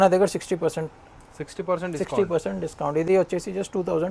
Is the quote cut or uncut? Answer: uncut